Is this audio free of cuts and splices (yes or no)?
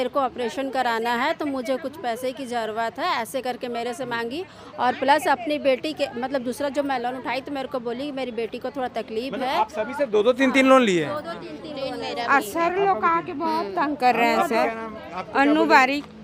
yes